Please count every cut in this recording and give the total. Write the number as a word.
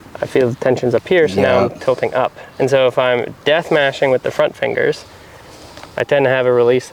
zero